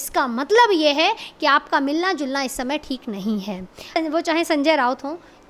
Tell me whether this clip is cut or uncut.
cut